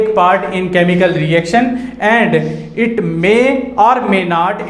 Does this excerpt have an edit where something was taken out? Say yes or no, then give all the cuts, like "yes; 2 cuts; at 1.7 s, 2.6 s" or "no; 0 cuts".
no; 0 cuts